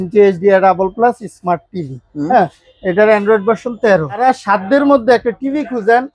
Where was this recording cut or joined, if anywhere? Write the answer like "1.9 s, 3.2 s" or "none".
4.2 s